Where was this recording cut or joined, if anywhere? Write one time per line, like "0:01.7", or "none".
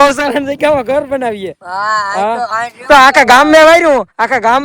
none